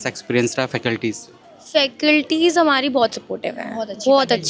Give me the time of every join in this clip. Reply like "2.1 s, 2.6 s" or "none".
none

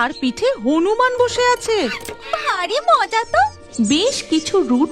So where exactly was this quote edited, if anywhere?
3.6 s

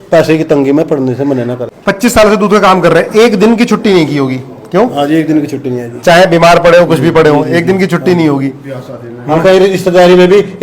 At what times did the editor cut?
1.6 s

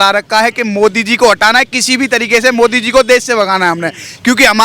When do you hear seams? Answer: none

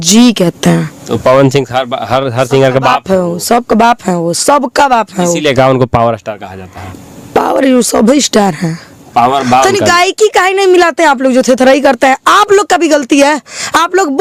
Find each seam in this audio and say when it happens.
none

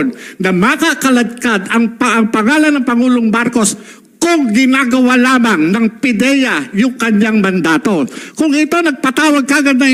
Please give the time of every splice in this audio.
none

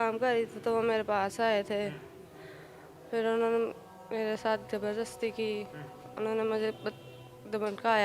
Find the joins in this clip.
none

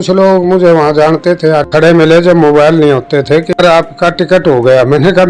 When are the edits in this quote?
1.6 s, 3.5 s

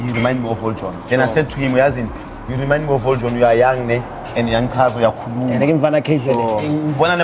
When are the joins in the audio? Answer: 1.0 s

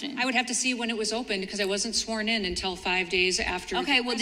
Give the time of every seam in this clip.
none

